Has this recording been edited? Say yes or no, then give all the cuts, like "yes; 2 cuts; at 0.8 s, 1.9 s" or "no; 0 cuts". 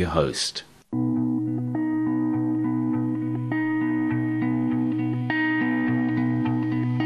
yes; 1 cut; at 1.0 s